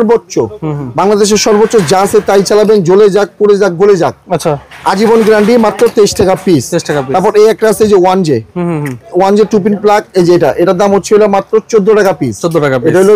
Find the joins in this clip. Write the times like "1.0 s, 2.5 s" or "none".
none